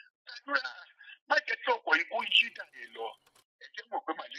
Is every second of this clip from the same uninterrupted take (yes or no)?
no